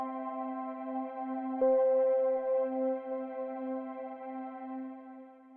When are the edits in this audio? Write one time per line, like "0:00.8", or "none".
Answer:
none